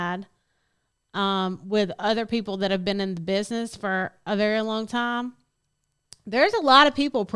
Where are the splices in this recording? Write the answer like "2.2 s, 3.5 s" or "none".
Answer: none